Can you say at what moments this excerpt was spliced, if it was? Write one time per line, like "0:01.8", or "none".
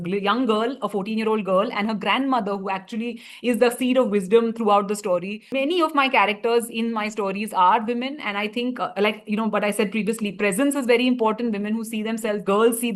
0:05.6

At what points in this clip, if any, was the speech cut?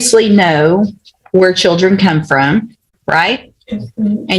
none

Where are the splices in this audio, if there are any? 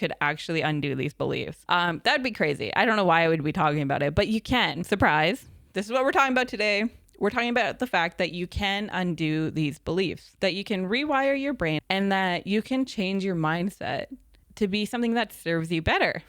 0:01.5
0:04.8
0:10.3
0:11.8

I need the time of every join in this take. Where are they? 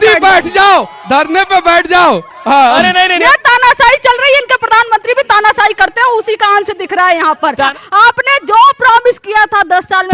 0:03.1
0:07.7

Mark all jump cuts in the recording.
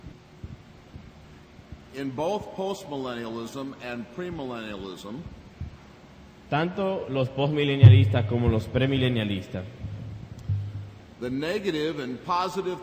0:08.7

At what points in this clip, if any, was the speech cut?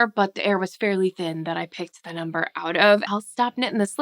0:03.1

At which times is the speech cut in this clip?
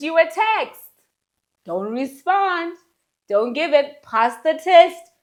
none

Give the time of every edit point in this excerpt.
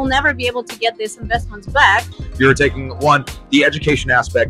0:02.1

